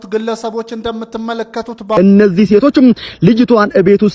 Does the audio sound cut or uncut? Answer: cut